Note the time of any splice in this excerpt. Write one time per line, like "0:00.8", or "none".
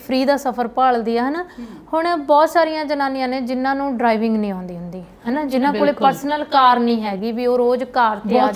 none